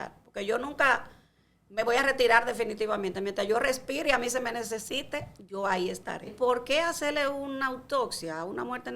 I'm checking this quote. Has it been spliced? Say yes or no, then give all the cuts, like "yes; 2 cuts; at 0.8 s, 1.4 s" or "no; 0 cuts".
yes; 1 cut; at 6.3 s